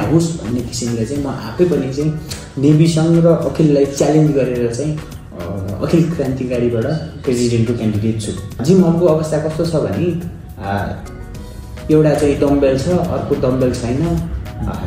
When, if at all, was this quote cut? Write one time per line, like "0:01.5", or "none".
0:08.6

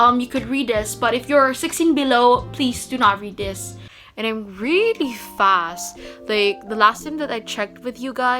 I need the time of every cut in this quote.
0:03.9

